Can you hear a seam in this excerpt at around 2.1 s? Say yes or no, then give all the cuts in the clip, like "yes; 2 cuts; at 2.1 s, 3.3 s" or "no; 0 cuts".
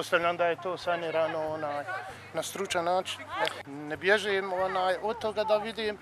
no; 1 cut; at 3.6 s